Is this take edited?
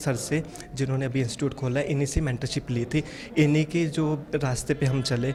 no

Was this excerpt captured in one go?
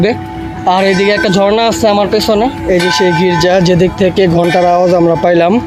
no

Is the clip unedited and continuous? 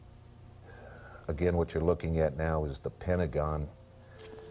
yes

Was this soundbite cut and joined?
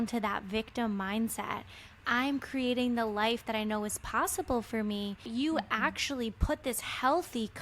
yes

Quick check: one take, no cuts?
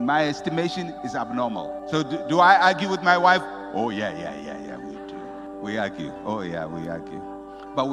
yes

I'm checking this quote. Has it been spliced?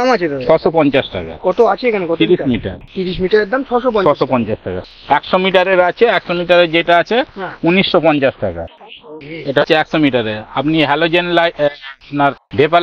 no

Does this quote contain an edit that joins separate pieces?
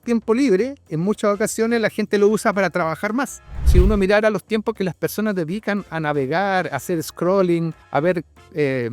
yes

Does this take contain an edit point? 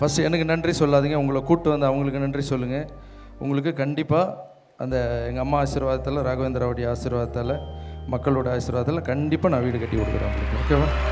no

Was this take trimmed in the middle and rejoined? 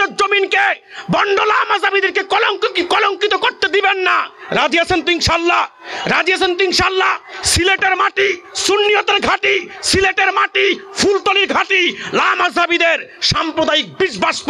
no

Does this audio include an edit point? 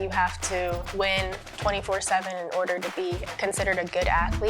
yes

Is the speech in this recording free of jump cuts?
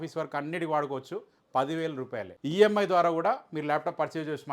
no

